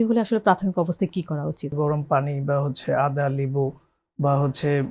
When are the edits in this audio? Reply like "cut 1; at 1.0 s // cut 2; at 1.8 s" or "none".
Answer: cut 1; at 1.7 s